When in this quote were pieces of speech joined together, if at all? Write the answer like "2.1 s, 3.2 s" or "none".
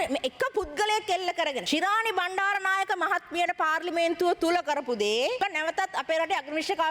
1.6 s, 5.4 s